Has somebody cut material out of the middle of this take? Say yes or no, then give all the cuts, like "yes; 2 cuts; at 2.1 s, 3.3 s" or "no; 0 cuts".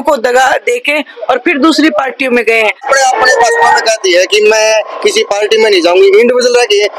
yes; 1 cut; at 2.8 s